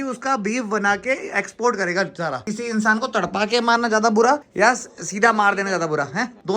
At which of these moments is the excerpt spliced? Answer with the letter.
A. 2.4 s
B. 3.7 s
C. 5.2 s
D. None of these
A